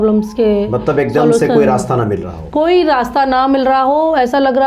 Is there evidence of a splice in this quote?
no; 0 cuts

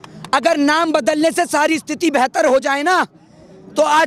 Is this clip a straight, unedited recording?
yes; 0 cuts

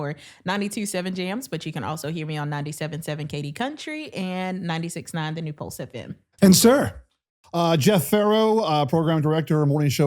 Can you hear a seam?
yes; 1 cut; at 6.3 s

